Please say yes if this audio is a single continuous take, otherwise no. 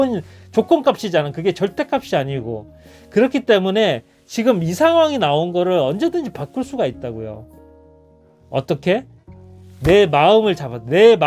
yes